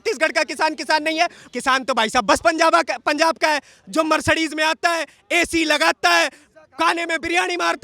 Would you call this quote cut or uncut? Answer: cut